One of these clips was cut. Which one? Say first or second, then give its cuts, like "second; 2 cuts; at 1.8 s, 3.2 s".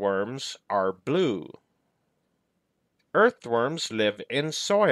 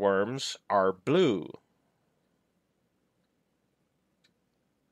first; 1 cut; at 3.0 s